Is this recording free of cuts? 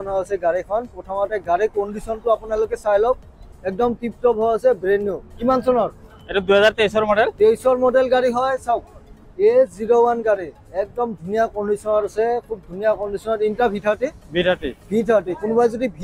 yes; 0 cuts

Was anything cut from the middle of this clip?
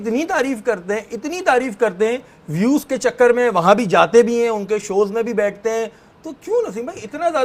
no; 0 cuts

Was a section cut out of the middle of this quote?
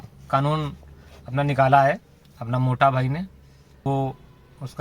yes; 1 cut; at 3.9 s

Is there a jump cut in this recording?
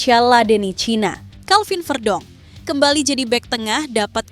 yes; 1 cut; at 1.3 s

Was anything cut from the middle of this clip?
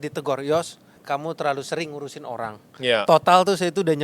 yes; 1 cut; at 1.0 s

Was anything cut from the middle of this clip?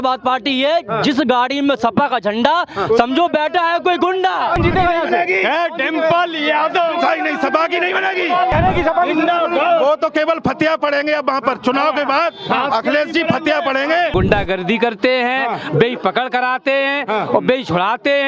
yes; 3 cuts; at 4.6 s, 8.5 s, 14.1 s

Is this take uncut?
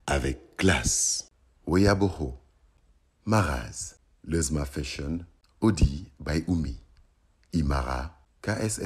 yes; 0 cuts

